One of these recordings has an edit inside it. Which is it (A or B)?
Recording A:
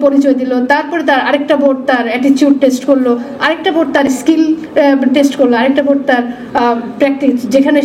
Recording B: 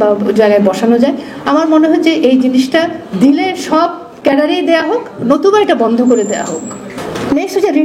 B